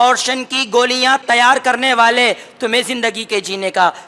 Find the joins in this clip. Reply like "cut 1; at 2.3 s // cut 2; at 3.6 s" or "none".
cut 1; at 1.2 s